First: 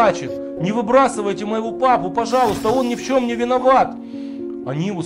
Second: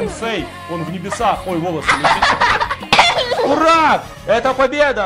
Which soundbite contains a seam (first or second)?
second